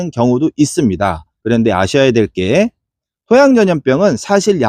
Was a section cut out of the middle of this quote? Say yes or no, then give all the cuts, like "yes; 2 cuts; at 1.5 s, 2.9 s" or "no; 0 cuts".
yes; 1 cut; at 1.3 s